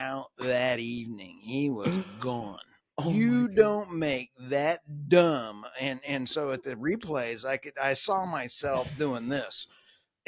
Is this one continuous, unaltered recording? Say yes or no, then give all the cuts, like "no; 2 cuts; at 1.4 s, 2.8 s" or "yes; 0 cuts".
yes; 0 cuts